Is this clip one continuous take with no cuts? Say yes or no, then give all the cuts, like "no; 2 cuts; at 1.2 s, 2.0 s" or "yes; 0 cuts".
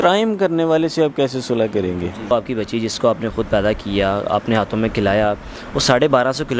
no; 1 cut; at 2.3 s